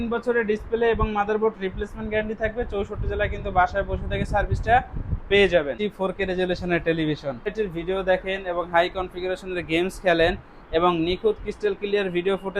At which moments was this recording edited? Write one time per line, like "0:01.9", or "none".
0:05.8
0:07.5